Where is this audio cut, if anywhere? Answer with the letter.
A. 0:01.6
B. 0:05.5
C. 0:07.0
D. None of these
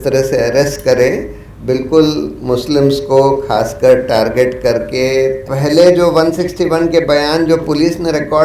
B